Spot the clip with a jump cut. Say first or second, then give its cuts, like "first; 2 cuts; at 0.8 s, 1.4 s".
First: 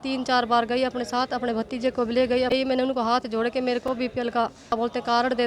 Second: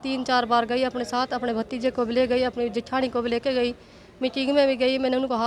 first; 2 cuts; at 2.5 s, 4.7 s